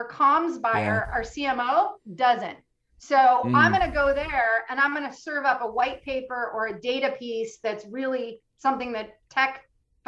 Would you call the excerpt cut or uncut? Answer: uncut